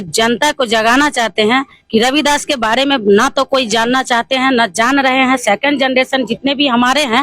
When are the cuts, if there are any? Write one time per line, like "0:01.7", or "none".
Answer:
none